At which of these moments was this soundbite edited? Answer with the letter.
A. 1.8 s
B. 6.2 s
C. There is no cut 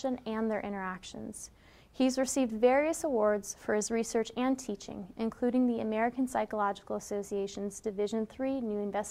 B